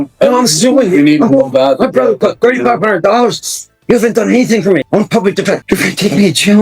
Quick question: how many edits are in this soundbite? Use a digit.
2